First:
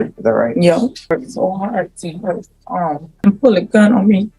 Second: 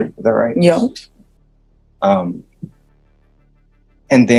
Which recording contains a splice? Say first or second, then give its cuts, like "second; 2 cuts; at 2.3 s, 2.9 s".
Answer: first; 2 cuts; at 1.1 s, 3.1 s